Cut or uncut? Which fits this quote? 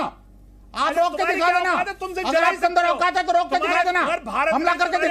uncut